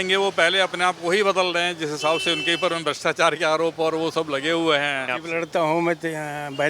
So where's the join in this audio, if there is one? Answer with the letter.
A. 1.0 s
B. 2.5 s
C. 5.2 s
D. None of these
C